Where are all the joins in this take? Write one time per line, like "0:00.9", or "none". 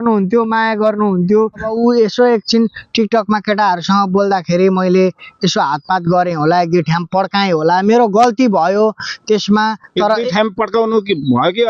0:01.6